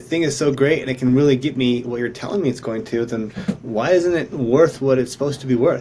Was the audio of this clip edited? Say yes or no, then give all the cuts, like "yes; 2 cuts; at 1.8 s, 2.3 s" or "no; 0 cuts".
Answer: no; 0 cuts